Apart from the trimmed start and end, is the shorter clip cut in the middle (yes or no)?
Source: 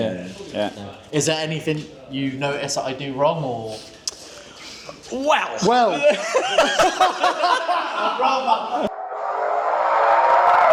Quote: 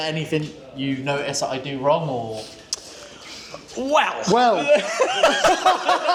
no